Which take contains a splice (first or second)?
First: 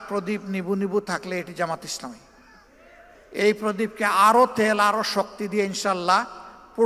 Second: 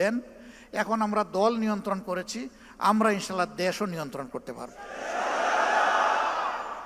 first